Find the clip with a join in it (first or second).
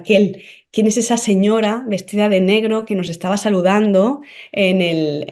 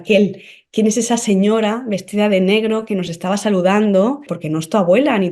second